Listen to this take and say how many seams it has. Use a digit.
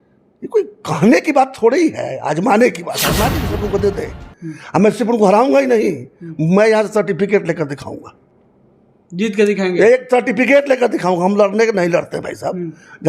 1